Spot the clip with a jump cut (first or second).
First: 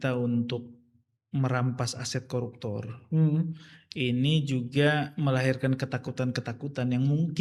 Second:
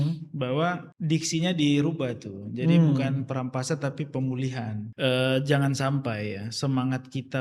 second